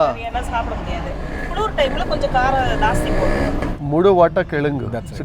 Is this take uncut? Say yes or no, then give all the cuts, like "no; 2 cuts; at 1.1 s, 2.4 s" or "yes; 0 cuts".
no; 1 cut; at 3.6 s